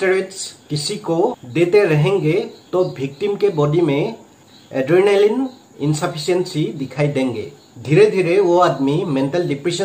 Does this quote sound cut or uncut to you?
uncut